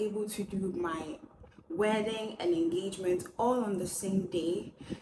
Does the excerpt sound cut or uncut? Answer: uncut